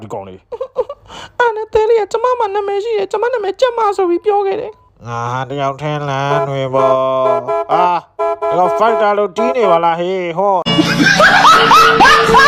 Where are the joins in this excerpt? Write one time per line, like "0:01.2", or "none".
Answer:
0:10.6

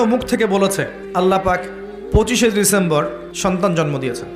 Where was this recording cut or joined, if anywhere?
0:00.9
0:03.2

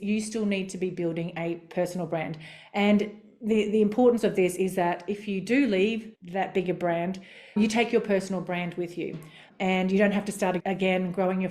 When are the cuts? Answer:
0:10.6

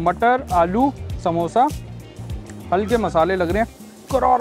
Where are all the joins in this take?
none

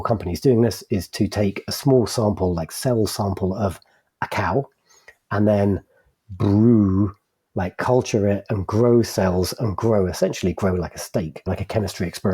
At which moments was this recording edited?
0:11.4

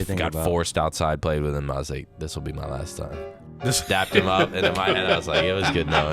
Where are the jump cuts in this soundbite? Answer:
none

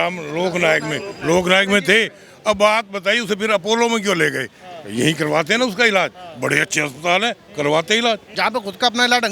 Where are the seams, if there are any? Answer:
0:08.3

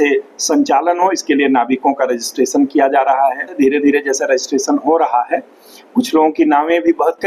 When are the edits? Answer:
0:03.6

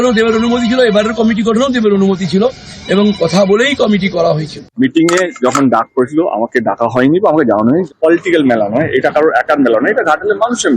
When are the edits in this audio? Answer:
0:04.7
0:07.9

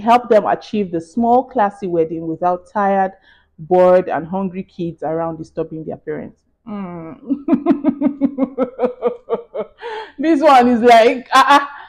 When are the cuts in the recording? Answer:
none

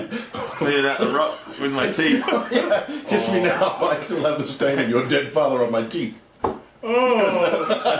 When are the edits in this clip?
none

